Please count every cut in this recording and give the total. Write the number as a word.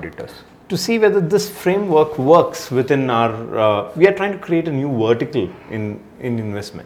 zero